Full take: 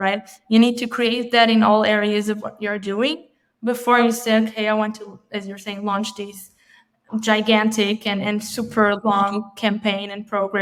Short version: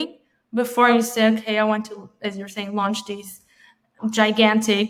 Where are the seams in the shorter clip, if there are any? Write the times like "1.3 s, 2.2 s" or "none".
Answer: none